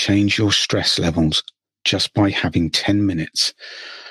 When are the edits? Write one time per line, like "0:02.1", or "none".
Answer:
none